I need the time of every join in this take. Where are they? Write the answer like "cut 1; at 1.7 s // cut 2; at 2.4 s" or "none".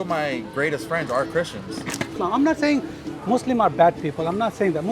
cut 1; at 2.2 s